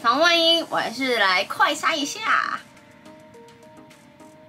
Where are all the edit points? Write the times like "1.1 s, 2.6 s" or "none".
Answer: 2.7 s